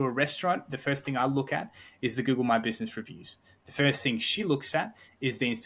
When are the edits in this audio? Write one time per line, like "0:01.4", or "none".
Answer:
none

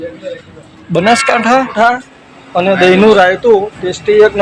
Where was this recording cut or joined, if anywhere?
0:01.8

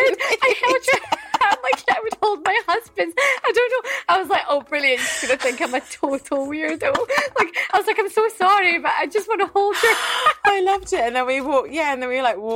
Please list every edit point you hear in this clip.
none

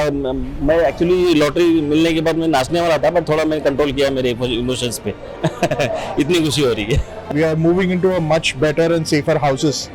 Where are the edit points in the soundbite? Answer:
0:07.3

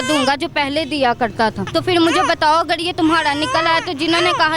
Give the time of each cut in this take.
0:01.7

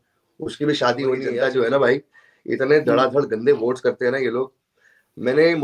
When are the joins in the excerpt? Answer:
0:01.3

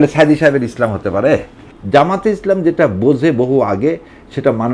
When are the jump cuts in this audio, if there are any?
0:01.7

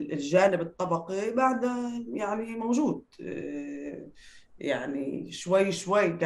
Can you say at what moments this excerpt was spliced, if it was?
none

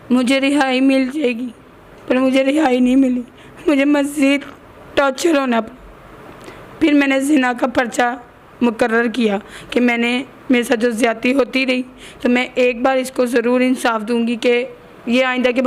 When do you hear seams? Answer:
none

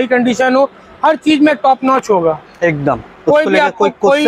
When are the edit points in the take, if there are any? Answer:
none

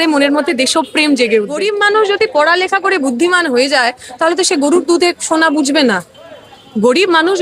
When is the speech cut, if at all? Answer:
0:01.6

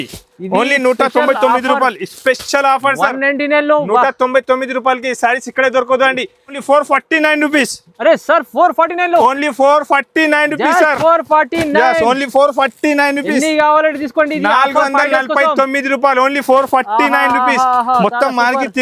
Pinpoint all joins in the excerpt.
0:06.5

